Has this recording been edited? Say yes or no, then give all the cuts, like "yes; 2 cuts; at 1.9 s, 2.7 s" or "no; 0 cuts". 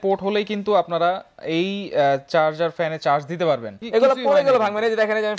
yes; 1 cut; at 3.8 s